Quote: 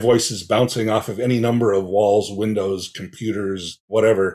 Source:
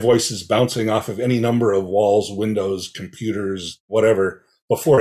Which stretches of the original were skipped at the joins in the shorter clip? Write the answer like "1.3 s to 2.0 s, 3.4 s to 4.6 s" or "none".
none